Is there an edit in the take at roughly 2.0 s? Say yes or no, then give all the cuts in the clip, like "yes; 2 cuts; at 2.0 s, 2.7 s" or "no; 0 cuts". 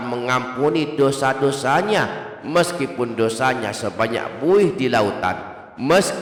no; 0 cuts